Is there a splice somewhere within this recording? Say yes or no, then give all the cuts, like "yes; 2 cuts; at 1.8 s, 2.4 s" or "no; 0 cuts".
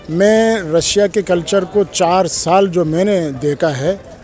no; 0 cuts